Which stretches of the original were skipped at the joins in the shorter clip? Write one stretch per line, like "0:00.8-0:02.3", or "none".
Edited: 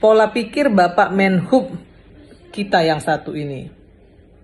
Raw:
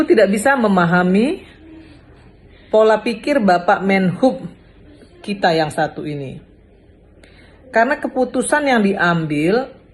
none